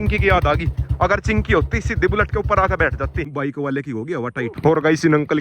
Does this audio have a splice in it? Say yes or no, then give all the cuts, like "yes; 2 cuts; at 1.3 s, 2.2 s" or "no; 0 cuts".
yes; 2 cuts; at 3.2 s, 4.6 s